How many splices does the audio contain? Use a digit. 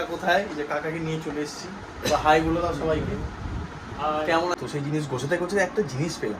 1